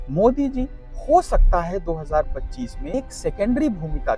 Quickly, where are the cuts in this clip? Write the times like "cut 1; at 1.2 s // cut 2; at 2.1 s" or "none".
cut 1; at 2.9 s